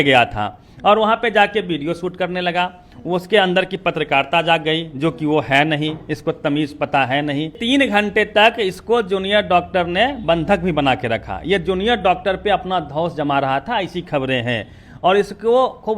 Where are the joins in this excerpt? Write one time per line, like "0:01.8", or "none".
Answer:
0:07.5